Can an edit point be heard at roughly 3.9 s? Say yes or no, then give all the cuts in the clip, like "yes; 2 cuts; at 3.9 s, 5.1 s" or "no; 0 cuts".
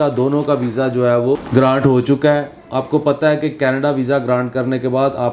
no; 1 cut; at 1.4 s